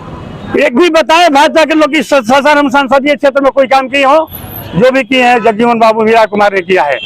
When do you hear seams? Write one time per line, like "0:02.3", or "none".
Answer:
none